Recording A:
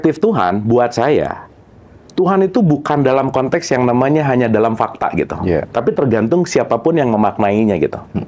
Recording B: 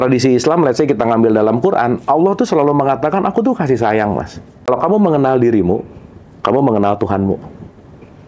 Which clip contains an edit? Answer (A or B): B